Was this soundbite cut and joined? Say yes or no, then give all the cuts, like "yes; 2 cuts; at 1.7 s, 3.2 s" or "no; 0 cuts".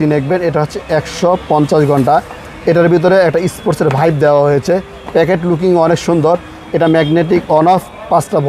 no; 0 cuts